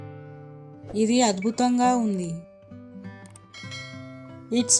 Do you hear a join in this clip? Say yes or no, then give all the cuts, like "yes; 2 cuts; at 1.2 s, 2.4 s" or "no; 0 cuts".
yes; 3 cuts; at 0.9 s, 2.4 s, 3.9 s